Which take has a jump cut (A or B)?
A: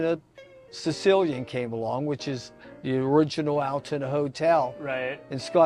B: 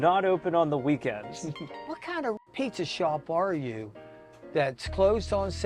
B